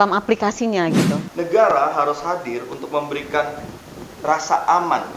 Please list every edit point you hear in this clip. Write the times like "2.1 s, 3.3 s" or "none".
1.2 s